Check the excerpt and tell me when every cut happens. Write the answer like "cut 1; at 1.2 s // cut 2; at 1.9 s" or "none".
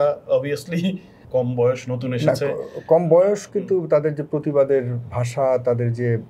cut 1; at 1.1 s